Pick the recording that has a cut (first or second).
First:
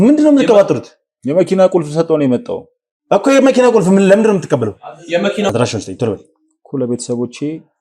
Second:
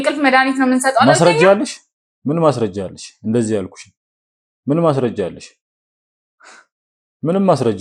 first